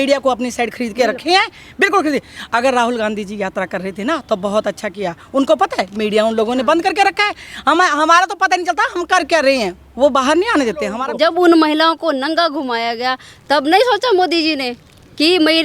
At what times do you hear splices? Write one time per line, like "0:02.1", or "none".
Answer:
0:11.0

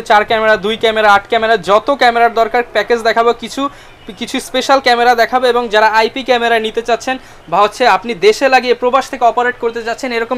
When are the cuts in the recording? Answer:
none

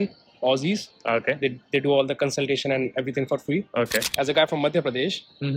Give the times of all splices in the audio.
0:04.1

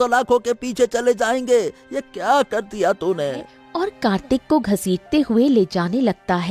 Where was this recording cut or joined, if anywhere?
0:03.6

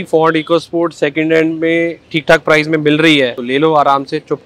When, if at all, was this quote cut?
0:02.1
0:03.4

